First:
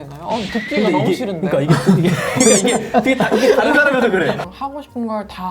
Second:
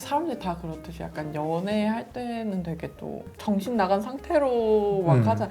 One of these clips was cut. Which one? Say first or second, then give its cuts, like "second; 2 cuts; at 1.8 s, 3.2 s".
first; 1 cut; at 4.4 s